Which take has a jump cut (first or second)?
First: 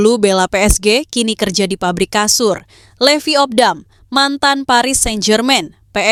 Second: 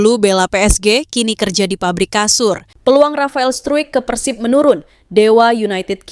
second